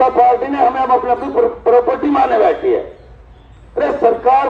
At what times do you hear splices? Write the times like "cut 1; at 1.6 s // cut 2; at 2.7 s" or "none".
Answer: none